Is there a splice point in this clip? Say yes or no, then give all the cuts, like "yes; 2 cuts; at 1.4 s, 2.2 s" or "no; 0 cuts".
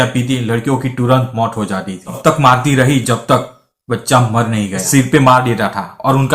yes; 2 cuts; at 2.2 s, 4.9 s